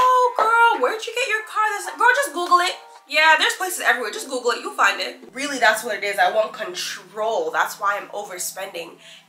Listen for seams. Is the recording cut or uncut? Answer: cut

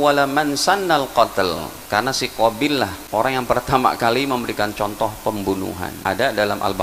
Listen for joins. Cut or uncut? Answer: cut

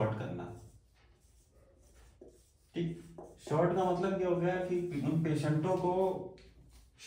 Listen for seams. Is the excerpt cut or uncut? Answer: cut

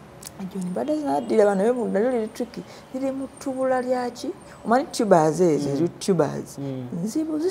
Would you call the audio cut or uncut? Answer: uncut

